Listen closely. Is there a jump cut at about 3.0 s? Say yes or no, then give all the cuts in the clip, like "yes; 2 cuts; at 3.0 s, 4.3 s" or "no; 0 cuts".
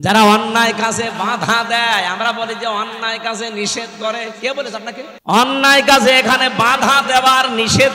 no; 1 cut; at 5.1 s